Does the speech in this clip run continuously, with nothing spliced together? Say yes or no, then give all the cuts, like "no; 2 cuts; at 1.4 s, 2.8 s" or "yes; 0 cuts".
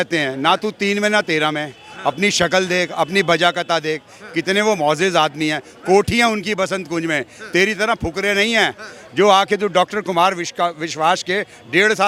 yes; 0 cuts